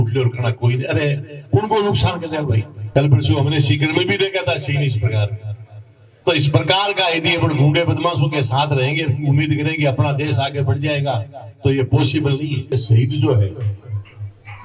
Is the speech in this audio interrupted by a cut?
yes; 2 cuts; at 2.7 s, 12.7 s

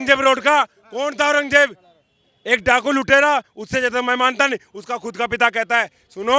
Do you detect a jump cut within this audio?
no; 0 cuts

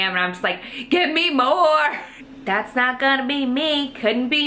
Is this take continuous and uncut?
no; 1 cut; at 2.1 s

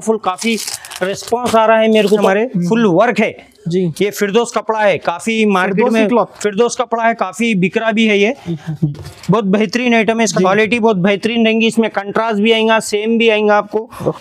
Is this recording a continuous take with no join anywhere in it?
no; 2 cuts; at 2.2 s, 10.3 s

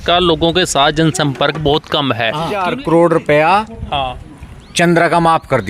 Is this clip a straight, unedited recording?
no; 1 cut; at 2.6 s

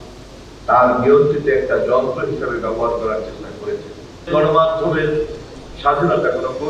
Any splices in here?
yes; 1 cut; at 4.3 s

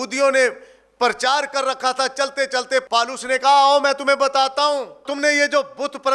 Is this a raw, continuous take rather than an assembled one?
no; 2 cuts; at 2.8 s, 5.0 s

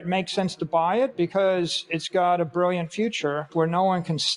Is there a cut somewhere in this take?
yes; 1 cut; at 3.5 s

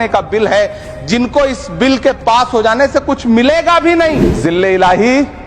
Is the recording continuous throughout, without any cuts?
no; 1 cut; at 4.3 s

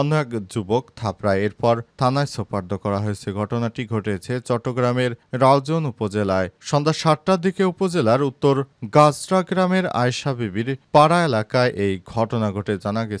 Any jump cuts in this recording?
no; 0 cuts

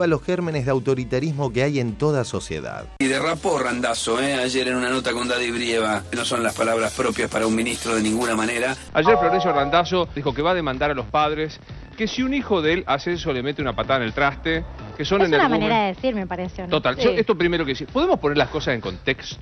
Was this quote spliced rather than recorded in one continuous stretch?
yes; 3 cuts; at 2.8 s, 6.1 s, 8.8 s

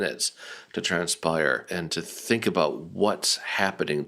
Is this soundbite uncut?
no; 1 cut; at 1.7 s

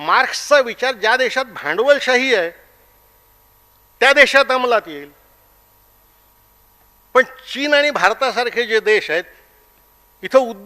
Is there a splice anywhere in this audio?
no; 0 cuts

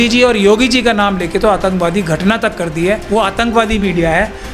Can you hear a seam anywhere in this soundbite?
yes; 1 cut; at 3.0 s

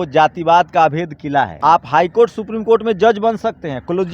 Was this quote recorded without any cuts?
no; 1 cut; at 1.5 s

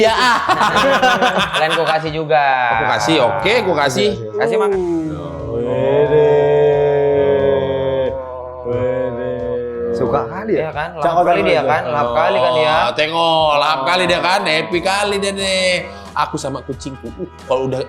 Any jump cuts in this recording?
yes; 1 cut; at 4.3 s

